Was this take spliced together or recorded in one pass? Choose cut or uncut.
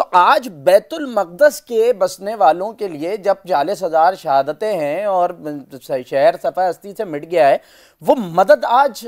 uncut